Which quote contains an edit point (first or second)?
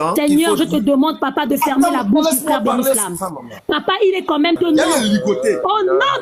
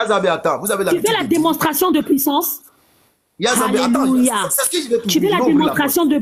first